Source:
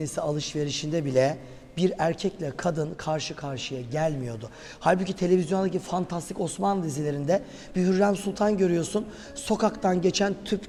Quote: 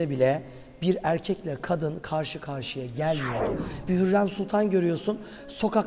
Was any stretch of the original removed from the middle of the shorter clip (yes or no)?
yes